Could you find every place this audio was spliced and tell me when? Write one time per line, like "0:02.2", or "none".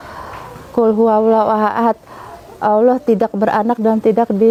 none